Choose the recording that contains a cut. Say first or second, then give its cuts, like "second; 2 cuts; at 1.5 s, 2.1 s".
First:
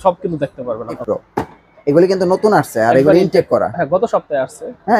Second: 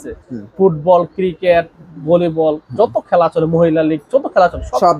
first; 1 cut; at 1.0 s